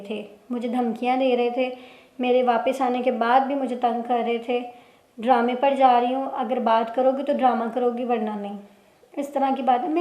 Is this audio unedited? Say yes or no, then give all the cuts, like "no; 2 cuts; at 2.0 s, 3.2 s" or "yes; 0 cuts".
yes; 0 cuts